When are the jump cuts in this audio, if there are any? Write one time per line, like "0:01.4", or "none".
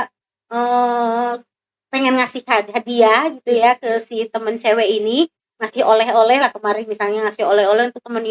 none